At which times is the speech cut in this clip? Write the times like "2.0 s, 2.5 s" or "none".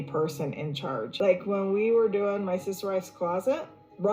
1.1 s